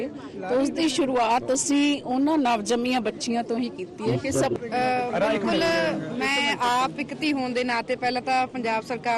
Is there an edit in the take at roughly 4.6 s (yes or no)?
yes